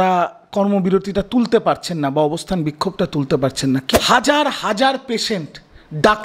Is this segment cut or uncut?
cut